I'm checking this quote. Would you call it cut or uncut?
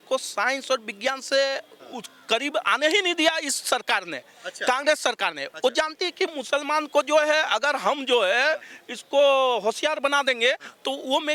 uncut